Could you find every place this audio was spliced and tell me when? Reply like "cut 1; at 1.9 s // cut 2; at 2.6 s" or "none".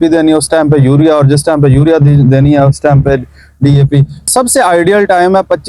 cut 1; at 4.2 s